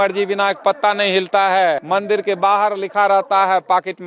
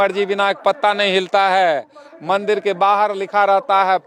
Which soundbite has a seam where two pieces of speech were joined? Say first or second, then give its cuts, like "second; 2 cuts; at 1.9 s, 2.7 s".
first; 1 cut; at 1.8 s